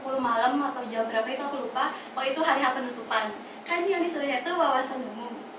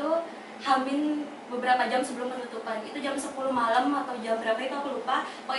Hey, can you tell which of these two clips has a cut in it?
first; 1 cut; at 3.5 s

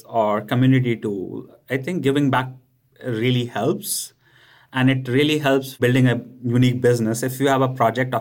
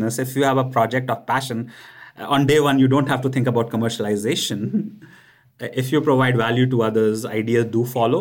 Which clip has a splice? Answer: first; 1 cut; at 5.8 s

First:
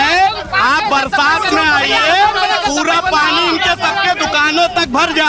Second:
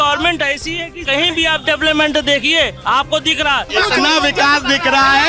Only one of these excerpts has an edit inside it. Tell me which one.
second; 3 cuts; at 1.0 s, 2.8 s, 3.7 s

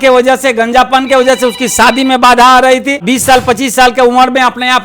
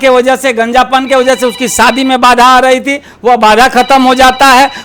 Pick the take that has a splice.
first; 1 cut; at 3.0 s

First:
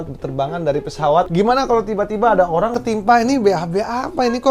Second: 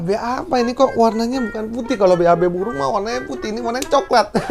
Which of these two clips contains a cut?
first; 2 cuts; at 1.3 s, 2.8 s

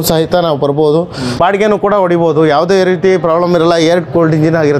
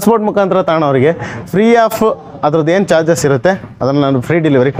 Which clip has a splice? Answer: first; 1 cut; at 1.4 s

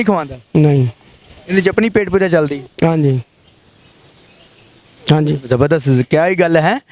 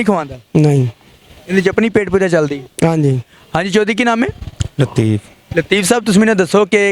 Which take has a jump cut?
second; 1 cut; at 3.3 s

